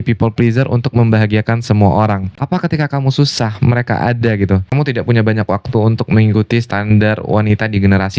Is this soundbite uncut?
no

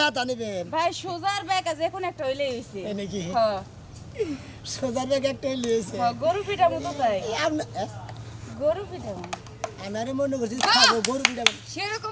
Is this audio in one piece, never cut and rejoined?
yes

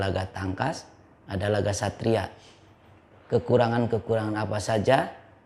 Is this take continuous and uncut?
yes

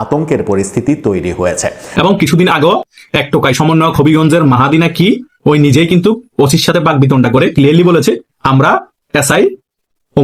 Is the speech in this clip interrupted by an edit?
yes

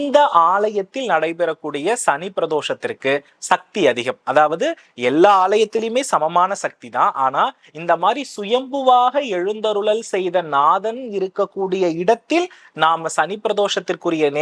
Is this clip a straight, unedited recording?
yes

